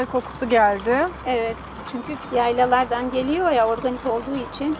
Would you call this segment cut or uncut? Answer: cut